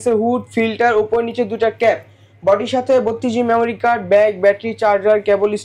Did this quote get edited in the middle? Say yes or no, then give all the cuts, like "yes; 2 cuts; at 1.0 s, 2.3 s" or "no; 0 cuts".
no; 0 cuts